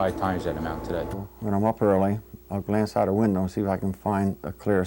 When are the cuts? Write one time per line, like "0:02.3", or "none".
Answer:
0:01.3